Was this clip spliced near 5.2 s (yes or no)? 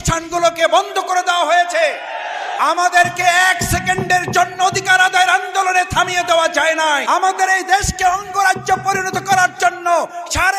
no